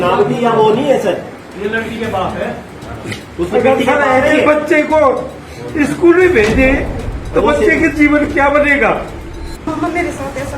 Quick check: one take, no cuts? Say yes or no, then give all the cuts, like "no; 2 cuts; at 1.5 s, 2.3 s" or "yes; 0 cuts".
no; 1 cut; at 9.7 s